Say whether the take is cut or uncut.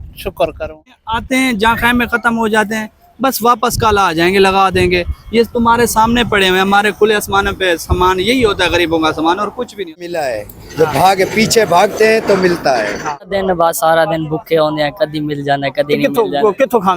cut